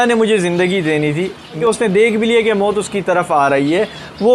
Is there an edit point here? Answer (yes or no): yes